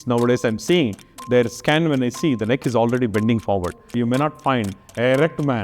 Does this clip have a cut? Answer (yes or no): yes